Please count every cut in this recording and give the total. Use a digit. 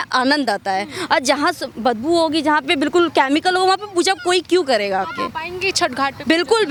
0